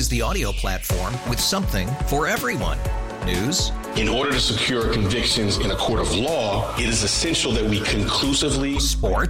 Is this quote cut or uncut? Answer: uncut